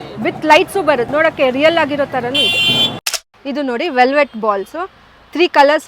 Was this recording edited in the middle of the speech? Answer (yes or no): yes